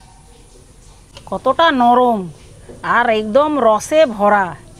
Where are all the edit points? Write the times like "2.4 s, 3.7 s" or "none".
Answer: 1.1 s